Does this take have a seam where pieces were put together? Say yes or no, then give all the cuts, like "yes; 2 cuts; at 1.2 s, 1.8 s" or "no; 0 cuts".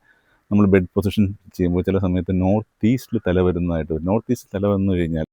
no; 0 cuts